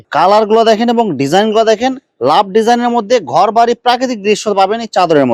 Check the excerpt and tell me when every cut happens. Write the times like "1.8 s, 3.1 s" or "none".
none

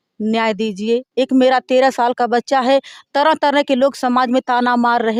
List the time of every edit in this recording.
none

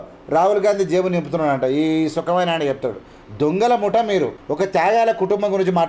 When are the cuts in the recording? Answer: none

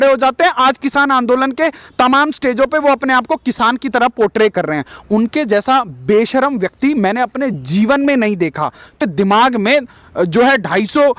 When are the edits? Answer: 9.0 s

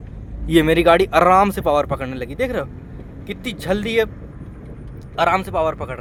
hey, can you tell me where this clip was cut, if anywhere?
none

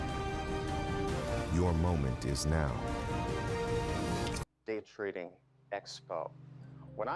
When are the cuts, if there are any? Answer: 4.4 s

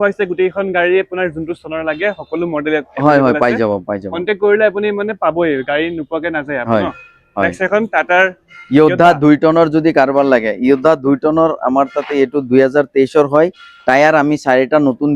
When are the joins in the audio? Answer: none

